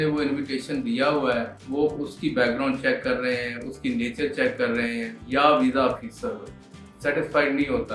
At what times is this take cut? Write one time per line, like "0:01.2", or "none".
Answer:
0:01.6
0:05.2